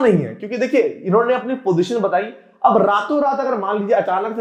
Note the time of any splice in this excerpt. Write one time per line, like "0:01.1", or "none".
none